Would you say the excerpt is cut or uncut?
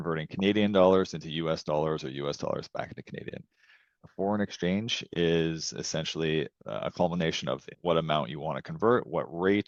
uncut